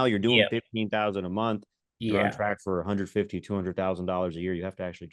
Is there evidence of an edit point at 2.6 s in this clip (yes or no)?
no